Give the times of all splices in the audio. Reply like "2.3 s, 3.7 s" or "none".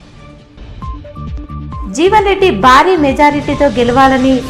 1.6 s